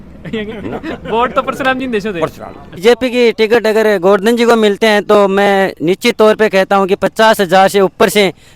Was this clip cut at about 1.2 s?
no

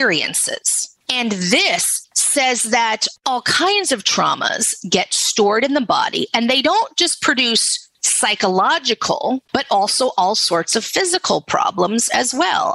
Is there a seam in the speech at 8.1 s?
no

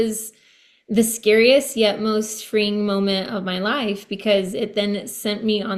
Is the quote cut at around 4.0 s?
no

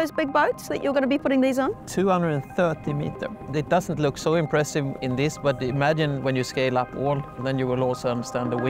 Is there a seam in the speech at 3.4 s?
yes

